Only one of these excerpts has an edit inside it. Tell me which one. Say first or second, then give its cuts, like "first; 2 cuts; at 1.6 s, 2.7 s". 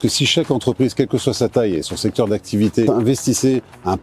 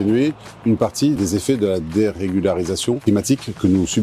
second; 1 cut; at 3.0 s